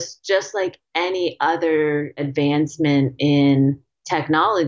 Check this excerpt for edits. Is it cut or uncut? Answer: cut